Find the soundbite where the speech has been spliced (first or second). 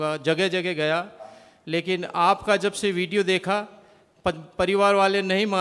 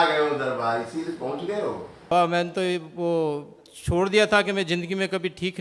second